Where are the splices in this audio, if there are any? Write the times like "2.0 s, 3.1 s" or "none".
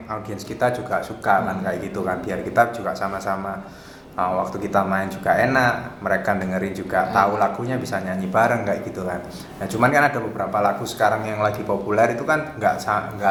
none